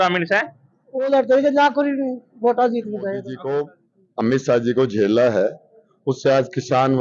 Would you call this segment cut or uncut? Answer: cut